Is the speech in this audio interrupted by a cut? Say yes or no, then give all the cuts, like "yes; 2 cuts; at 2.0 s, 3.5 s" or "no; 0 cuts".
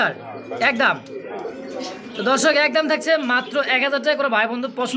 no; 0 cuts